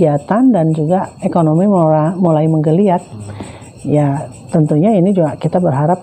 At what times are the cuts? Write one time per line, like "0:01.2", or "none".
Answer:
none